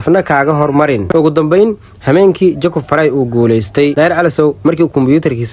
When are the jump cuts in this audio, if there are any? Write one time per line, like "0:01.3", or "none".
0:01.0